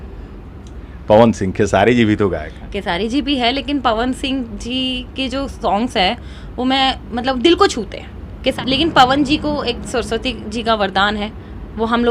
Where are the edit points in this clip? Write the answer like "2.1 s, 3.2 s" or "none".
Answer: 8.6 s